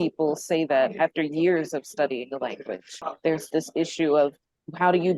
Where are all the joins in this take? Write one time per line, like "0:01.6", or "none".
0:03.0

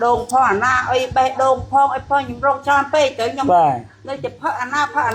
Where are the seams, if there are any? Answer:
none

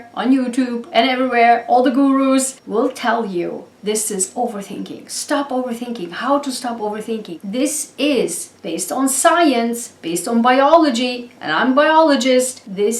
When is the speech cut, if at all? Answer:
0:07.3

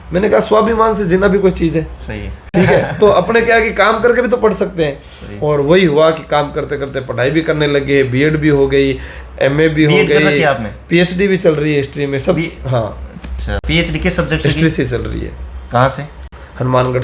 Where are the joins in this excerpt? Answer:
none

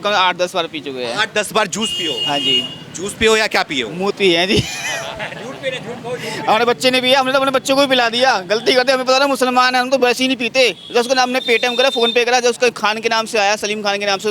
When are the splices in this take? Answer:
none

